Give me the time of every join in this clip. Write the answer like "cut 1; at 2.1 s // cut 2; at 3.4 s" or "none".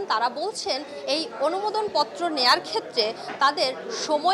none